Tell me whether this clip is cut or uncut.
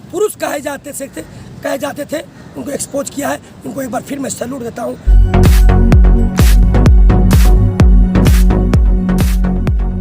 cut